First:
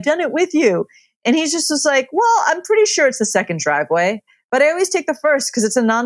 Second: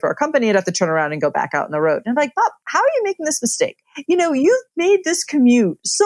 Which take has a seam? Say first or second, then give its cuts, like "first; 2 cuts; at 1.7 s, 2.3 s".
second; 1 cut; at 3.9 s